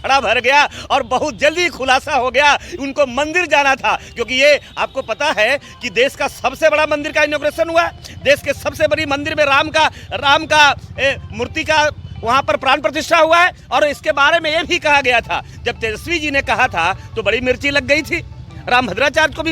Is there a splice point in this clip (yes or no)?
no